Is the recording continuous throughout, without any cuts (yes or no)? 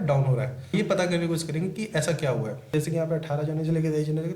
no